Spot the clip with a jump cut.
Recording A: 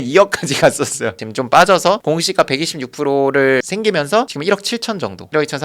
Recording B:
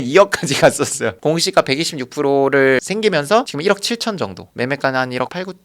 B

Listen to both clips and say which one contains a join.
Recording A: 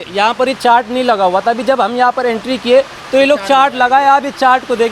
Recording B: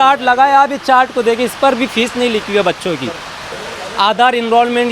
B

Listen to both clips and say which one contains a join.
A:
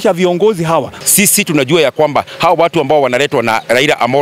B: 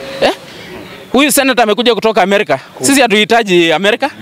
A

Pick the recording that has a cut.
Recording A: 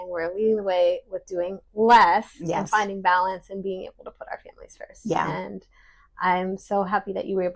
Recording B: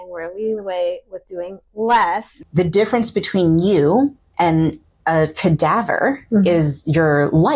B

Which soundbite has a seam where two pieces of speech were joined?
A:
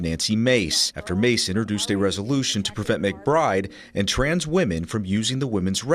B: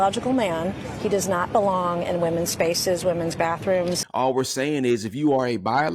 B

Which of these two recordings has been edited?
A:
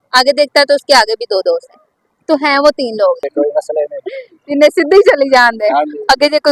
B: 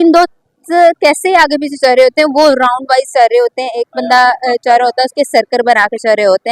A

